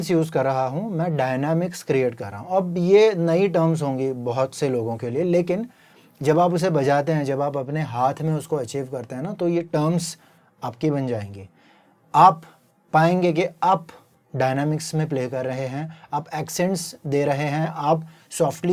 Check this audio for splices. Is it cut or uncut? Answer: uncut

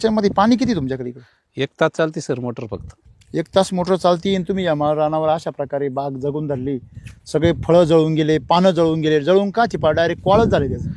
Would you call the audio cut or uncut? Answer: cut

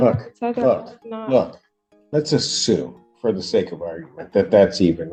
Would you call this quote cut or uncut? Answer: uncut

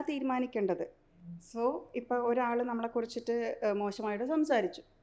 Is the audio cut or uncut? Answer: uncut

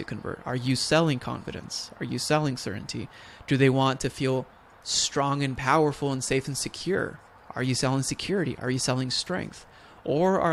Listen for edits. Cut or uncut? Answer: uncut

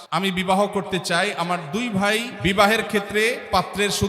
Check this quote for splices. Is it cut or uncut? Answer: cut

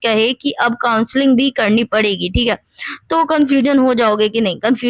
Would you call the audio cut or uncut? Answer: uncut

